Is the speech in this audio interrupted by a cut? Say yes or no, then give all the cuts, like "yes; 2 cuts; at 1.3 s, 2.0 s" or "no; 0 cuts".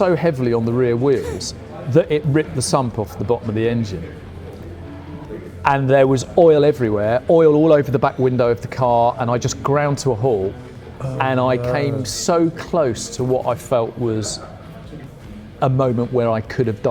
no; 0 cuts